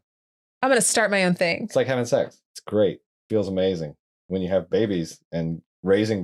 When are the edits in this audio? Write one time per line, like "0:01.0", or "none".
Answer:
0:04.1